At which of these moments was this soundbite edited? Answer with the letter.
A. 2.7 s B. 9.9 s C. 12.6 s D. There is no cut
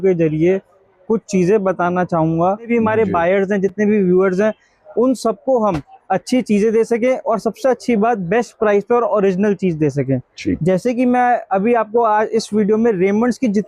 A